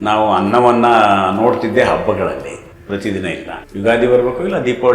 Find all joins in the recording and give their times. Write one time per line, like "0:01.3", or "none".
0:02.7
0:03.6